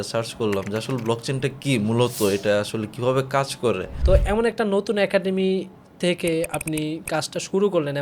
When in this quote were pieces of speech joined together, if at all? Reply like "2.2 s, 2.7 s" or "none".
3.9 s